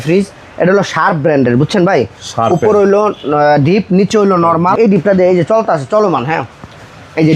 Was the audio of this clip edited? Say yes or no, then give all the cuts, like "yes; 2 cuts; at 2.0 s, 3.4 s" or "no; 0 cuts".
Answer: yes; 1 cut; at 4.8 s